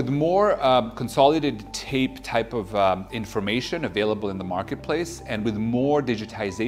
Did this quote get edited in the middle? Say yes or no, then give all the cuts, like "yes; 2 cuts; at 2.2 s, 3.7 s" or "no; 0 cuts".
no; 0 cuts